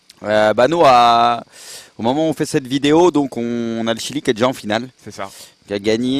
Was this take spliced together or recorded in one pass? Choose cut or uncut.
cut